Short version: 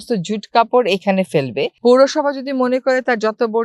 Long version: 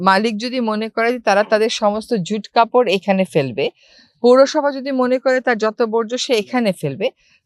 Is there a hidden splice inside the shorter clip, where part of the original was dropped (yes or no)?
yes